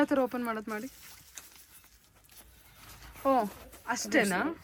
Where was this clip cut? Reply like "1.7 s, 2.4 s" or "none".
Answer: none

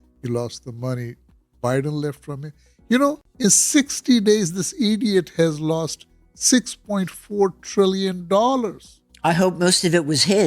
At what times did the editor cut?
3.3 s

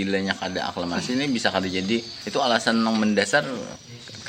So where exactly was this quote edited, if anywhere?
2.2 s

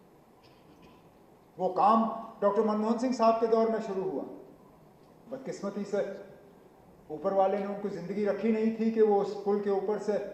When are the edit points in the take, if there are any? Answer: none

